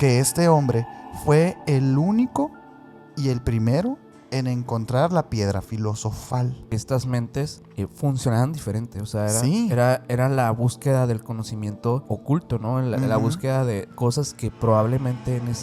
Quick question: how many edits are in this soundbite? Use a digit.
4